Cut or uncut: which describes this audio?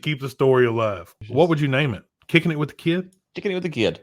cut